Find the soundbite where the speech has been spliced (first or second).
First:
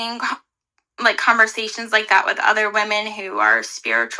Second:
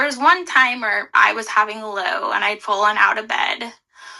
second